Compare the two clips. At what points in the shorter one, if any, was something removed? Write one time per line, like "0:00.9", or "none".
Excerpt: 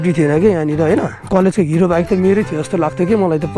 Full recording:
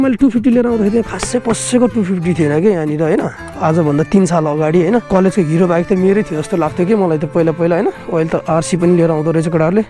0:01.3

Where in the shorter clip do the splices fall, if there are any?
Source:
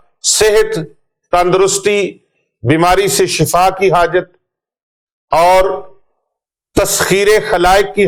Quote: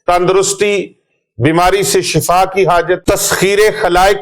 0:03.0

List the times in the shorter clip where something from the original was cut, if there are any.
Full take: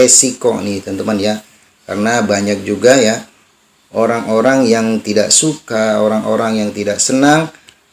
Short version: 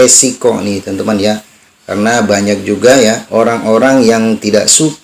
0:03.2

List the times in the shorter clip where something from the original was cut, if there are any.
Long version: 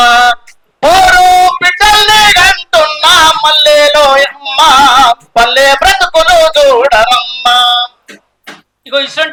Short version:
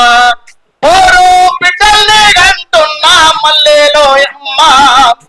none

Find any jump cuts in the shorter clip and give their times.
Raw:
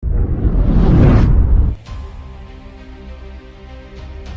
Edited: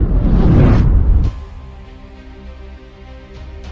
0:01.3

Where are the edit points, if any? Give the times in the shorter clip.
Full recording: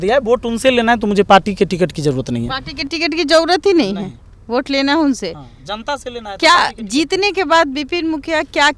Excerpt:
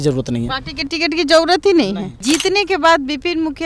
0:02.1

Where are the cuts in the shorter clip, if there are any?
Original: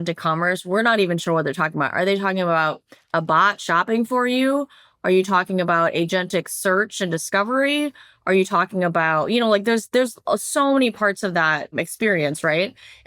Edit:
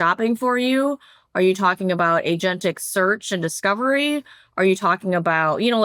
none

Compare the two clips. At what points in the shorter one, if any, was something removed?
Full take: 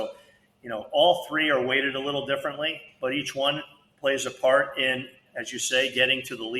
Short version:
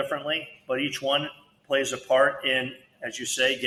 none

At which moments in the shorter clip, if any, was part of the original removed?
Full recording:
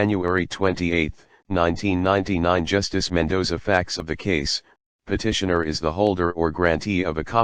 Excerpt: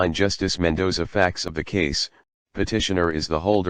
none

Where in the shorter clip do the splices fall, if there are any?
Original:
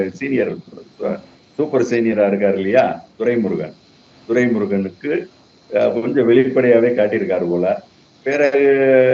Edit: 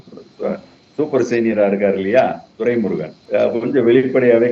0:03.1

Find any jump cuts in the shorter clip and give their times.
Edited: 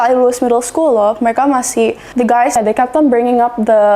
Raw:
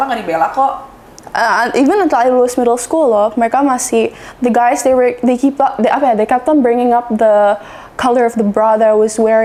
0:02.3

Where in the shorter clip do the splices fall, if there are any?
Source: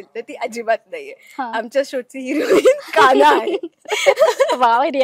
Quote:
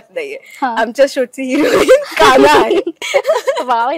0:03.0

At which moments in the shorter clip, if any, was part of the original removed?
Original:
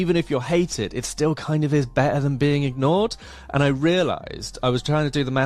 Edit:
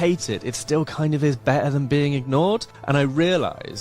0:02.7

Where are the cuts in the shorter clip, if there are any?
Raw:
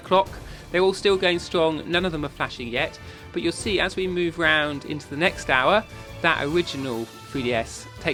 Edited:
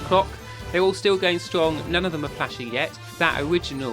0:03.0

